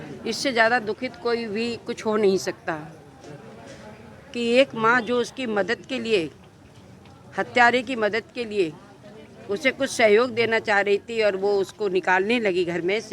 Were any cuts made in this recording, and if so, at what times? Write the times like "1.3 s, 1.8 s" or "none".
none